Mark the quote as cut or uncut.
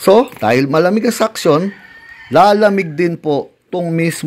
uncut